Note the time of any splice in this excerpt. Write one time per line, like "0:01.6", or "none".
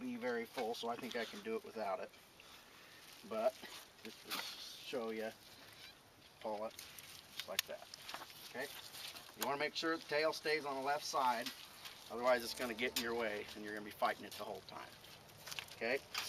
0:07.1